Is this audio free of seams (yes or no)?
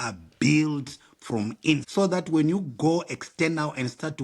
no